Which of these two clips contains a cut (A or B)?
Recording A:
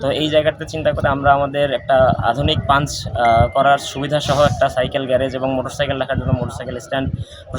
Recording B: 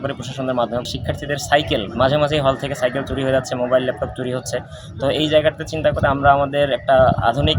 B